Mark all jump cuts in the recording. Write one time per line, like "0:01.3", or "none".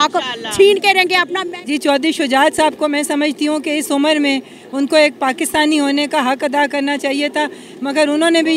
0:01.3